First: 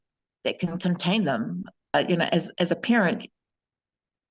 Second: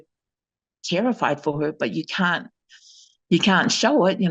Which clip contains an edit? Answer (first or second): first